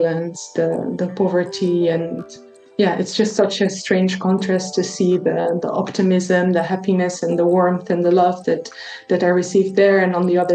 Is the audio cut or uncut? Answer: uncut